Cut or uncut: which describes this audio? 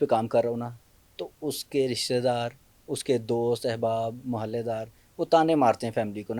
uncut